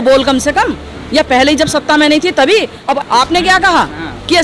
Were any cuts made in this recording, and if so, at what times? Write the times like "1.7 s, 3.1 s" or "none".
3.0 s